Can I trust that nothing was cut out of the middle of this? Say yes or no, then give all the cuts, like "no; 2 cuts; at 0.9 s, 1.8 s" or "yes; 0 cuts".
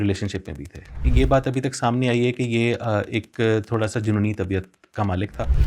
no; 1 cut; at 1.0 s